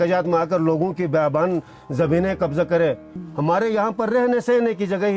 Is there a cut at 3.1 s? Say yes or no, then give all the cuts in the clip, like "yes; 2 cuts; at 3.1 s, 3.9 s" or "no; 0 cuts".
yes; 1 cut; at 3.1 s